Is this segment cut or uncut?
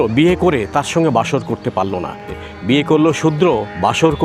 cut